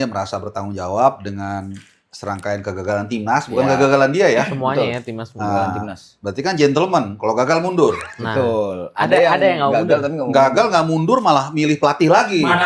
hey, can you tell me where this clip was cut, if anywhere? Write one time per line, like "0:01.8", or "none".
none

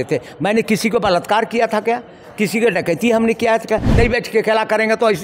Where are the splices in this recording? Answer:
0:03.9

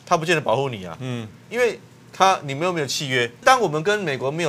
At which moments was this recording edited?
0:03.4

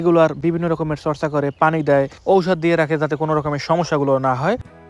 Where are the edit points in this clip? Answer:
none

